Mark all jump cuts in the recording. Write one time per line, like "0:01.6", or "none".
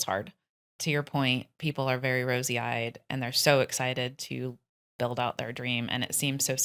none